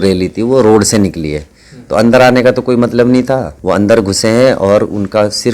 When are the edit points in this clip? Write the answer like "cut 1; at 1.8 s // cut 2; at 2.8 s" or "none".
cut 1; at 3.5 s